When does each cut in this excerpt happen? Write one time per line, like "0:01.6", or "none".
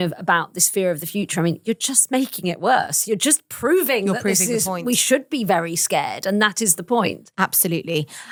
none